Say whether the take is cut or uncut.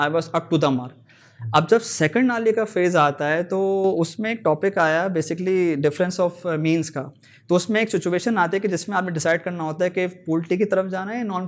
uncut